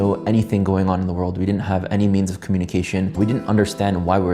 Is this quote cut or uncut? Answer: cut